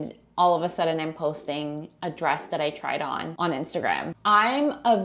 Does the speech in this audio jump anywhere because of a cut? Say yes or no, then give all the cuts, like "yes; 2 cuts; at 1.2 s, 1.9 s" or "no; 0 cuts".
yes; 2 cuts; at 3.3 s, 4.1 s